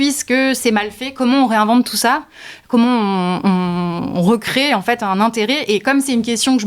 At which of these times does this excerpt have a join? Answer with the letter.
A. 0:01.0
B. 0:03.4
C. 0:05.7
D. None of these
D